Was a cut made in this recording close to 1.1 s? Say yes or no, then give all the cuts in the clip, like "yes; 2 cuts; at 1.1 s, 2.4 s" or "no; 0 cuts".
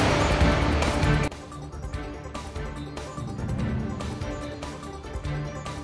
yes; 1 cut; at 1.1 s